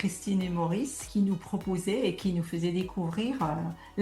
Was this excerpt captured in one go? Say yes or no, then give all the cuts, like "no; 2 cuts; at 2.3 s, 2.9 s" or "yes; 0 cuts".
no; 1 cut; at 1.0 s